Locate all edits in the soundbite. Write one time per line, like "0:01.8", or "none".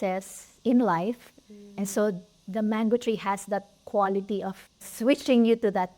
0:04.9